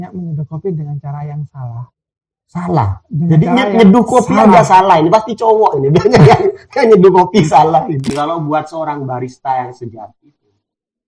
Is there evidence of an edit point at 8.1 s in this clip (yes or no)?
yes